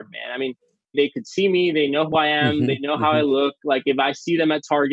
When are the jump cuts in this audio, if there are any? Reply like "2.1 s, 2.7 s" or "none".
2.1 s